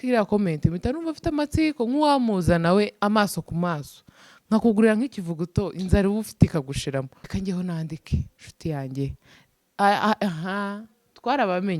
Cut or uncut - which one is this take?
cut